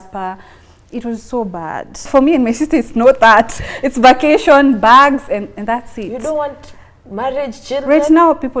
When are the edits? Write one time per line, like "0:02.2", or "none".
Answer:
0:02.1